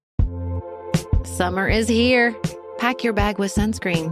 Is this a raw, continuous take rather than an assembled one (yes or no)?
no